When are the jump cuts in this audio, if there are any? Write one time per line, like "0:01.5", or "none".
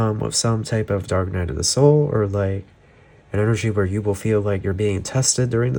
none